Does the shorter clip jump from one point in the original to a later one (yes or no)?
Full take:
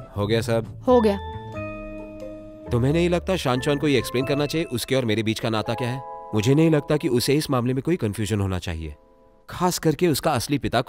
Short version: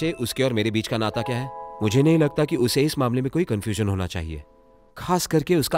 no